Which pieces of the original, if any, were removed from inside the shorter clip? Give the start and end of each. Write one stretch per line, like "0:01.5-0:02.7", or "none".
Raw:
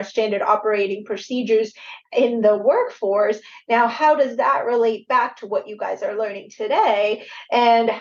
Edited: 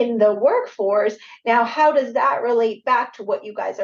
none

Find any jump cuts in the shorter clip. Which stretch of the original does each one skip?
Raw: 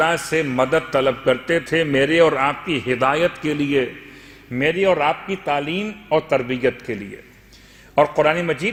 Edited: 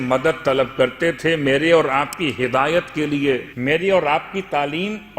0:04.0-0:04.4

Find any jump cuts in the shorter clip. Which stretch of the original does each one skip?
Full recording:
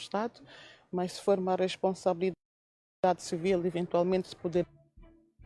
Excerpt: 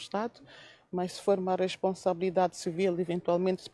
0:02.3-0:03.0

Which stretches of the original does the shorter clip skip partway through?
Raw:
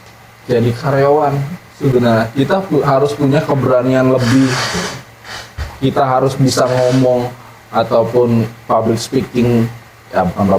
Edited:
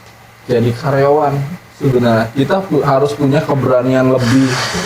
none

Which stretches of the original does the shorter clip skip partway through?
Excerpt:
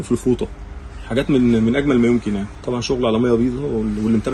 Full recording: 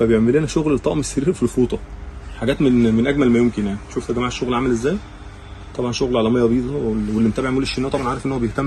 0:03.8-0:05.6

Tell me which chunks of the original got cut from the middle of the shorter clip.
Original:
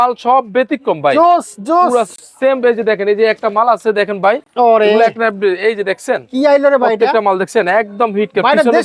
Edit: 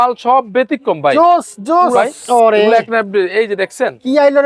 0:02.0-0:04.3

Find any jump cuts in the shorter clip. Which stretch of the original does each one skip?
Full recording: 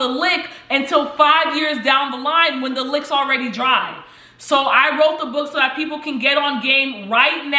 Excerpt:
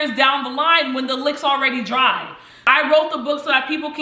0:04.3-0:04.7

